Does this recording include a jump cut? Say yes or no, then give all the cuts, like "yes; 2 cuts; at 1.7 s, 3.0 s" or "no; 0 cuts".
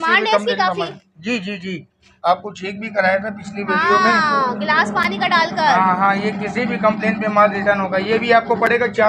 no; 0 cuts